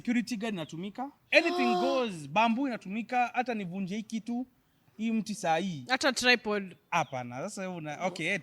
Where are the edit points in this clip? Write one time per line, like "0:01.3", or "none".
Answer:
0:01.2

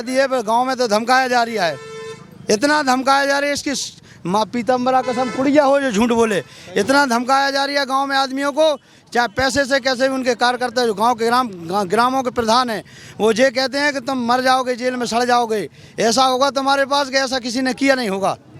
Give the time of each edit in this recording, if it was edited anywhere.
none

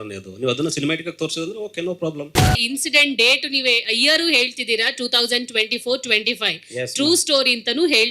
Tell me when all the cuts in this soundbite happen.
0:02.4

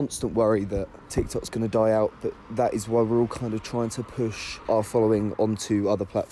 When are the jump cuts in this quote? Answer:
0:01.0
0:04.5

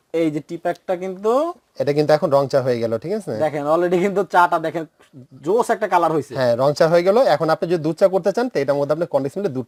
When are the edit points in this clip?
none

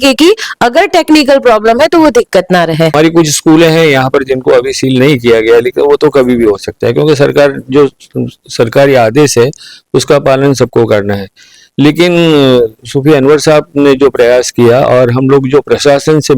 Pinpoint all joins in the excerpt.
0:02.9

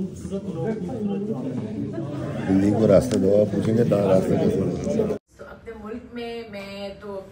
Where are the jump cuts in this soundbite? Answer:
0:05.1

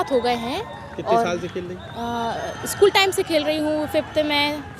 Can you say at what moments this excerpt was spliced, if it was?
none

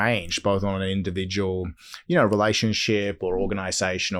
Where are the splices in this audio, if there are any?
none

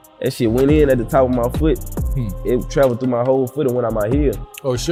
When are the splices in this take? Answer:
none

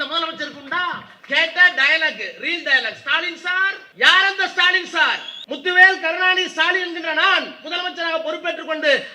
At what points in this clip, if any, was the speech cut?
0:01.1
0:03.8
0:05.3

